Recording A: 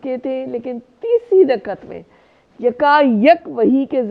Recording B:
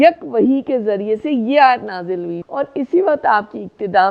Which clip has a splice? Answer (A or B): B